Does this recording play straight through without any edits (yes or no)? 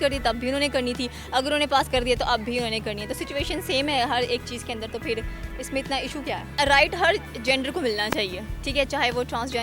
yes